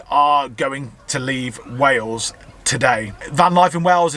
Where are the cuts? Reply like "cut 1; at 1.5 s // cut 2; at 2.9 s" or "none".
none